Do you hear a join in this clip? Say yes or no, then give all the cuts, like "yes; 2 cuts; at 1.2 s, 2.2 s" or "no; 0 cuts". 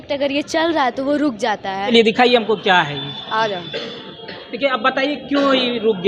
yes; 1 cut; at 1.9 s